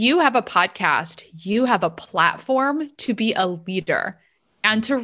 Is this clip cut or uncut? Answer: uncut